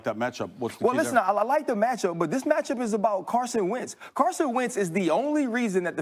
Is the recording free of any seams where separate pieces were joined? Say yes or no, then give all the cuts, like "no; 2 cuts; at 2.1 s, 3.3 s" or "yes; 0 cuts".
yes; 0 cuts